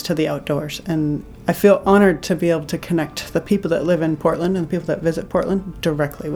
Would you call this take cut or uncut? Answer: cut